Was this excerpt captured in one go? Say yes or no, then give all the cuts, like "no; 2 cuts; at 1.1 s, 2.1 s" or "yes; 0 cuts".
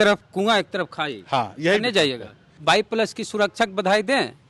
no; 1 cut; at 2.5 s